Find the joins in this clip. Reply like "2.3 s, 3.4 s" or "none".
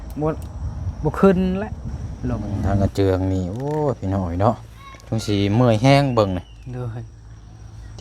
2.5 s